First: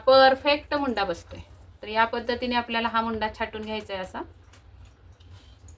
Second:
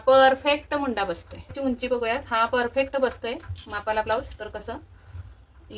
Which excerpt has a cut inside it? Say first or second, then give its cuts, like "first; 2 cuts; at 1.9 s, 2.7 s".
second; 1 cut; at 1.5 s